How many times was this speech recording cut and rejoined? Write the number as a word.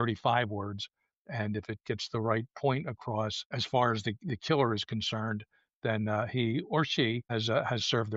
two